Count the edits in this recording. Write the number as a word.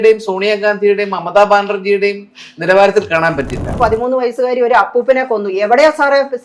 one